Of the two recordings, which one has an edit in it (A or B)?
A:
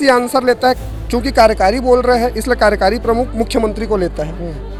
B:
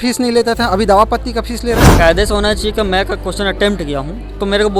B